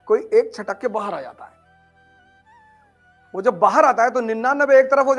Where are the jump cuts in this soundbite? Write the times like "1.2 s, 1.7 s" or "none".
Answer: none